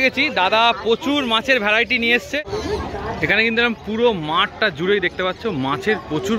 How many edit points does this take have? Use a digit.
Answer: 1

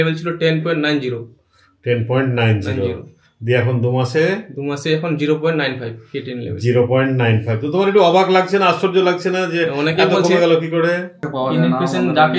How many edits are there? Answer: 1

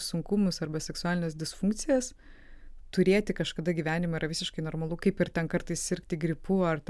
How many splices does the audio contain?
0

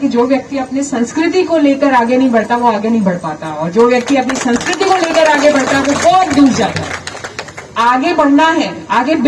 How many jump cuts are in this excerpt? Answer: 0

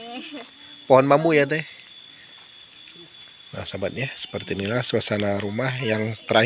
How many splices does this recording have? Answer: 1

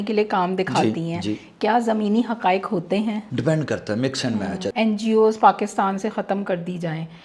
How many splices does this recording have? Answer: 2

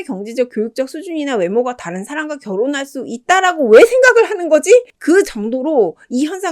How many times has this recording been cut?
1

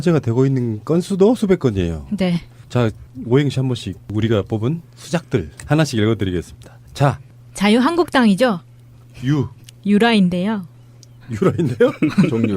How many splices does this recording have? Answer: 1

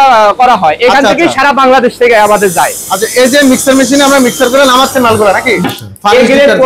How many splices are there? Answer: 1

